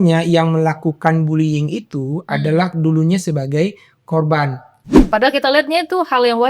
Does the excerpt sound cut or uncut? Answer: cut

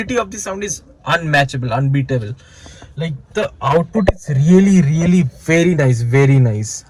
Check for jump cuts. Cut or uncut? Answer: uncut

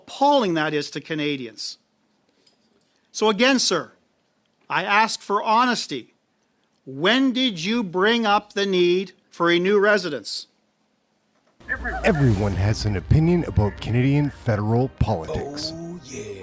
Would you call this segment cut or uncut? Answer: cut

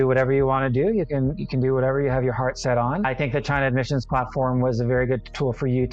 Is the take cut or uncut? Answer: cut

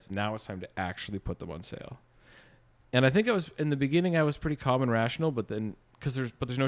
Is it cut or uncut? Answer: uncut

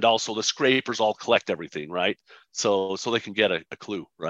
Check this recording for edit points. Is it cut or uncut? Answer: uncut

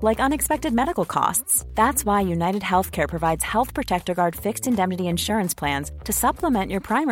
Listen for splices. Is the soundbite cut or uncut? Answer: uncut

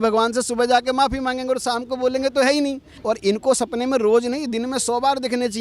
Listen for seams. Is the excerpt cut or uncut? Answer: cut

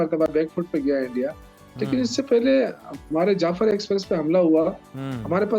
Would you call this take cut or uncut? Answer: uncut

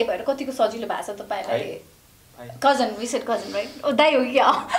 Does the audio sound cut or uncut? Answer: uncut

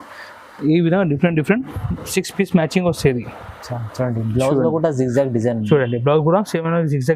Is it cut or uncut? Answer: uncut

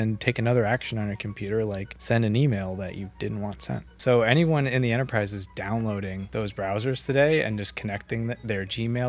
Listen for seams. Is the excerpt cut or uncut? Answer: cut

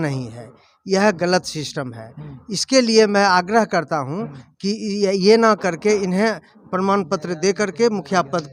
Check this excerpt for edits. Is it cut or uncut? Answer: uncut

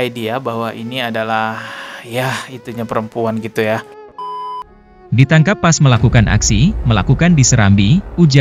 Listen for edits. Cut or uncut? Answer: cut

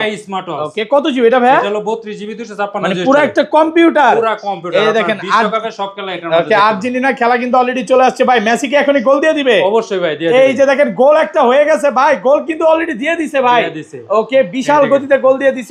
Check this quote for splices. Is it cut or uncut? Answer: uncut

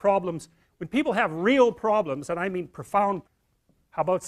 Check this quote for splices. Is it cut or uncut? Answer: uncut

